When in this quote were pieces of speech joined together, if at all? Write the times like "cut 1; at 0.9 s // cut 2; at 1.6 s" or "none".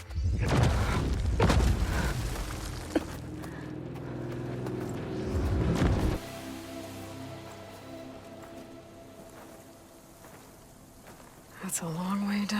cut 1; at 6.2 s